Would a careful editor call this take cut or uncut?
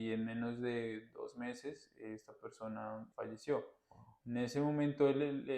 cut